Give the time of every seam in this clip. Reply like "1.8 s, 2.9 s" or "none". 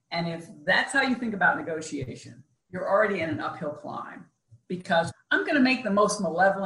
2.7 s, 5.1 s